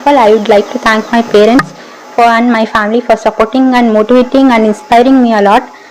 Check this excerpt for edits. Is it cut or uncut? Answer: uncut